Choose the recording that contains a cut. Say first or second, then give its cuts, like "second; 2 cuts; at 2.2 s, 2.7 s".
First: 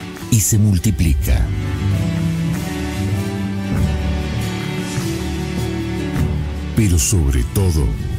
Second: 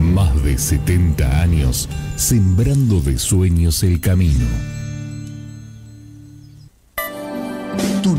second; 1 cut; at 6.6 s